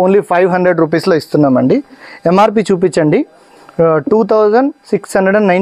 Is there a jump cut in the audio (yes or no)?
yes